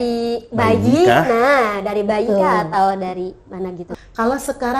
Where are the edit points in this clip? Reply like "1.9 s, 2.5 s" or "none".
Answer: 3.9 s